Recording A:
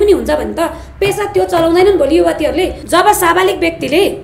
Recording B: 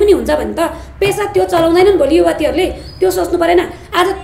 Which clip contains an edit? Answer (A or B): A